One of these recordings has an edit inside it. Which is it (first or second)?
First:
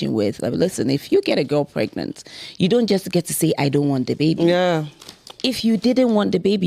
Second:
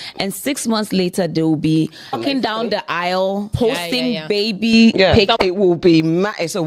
second